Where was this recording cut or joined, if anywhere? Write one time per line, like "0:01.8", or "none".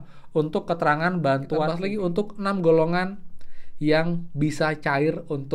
0:01.7